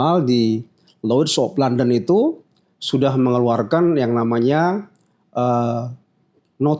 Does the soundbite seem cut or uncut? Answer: uncut